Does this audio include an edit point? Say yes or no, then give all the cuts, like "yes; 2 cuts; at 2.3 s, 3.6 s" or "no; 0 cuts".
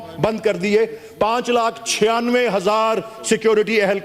no; 0 cuts